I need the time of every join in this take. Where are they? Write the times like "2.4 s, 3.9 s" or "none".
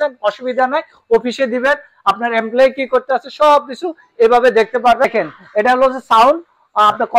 5.0 s

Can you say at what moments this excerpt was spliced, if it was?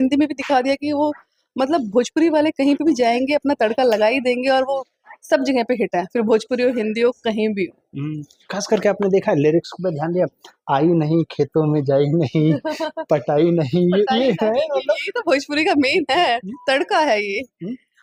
none

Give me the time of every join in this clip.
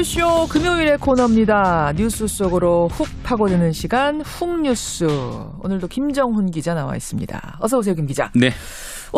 none

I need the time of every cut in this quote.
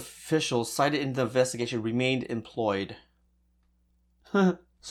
none

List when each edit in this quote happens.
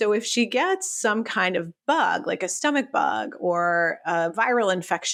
none

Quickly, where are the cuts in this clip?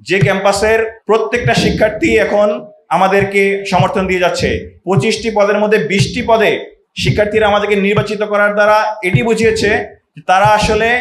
1.0 s, 4.7 s

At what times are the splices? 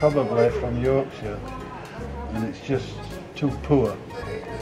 none

